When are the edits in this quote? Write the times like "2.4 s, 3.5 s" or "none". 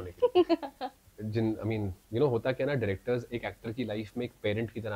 1.1 s

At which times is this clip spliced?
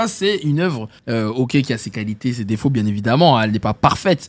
0.9 s

